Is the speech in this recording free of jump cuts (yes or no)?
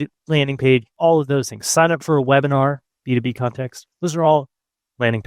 no